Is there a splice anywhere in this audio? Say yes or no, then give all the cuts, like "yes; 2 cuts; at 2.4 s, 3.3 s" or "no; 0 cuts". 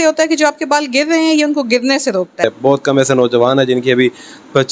yes; 1 cut; at 2.3 s